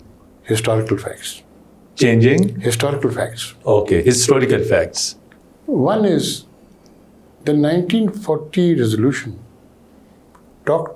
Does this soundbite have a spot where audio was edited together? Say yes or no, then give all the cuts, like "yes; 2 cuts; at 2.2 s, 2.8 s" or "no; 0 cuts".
no; 0 cuts